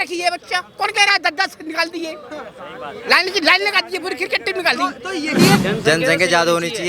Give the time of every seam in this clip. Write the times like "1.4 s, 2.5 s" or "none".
5.6 s